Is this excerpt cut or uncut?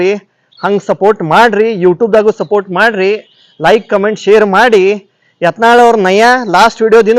uncut